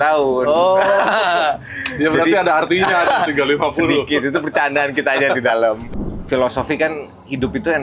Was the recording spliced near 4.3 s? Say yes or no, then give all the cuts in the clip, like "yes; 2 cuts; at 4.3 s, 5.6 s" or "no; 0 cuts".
no; 1 cut; at 5.9 s